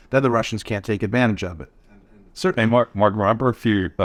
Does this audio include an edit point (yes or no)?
no